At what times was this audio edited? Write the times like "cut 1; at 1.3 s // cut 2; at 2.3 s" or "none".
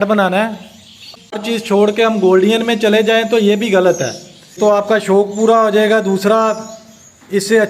cut 1; at 1.2 s // cut 2; at 4.6 s